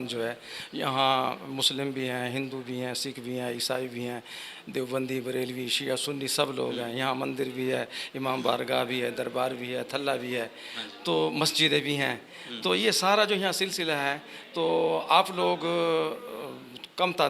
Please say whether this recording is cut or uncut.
uncut